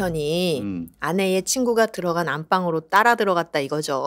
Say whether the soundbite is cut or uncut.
uncut